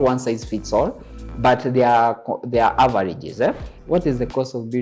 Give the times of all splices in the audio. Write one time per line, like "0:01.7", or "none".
0:03.7